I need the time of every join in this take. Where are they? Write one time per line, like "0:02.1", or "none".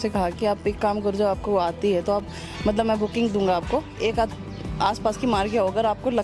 none